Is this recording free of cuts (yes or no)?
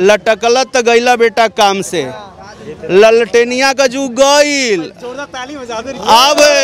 yes